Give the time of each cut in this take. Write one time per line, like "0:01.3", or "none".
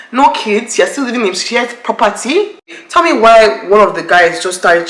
0:02.8